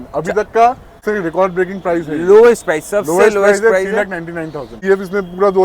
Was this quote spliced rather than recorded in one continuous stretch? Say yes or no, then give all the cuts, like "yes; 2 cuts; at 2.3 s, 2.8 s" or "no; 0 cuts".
yes; 2 cuts; at 0.9 s, 4.7 s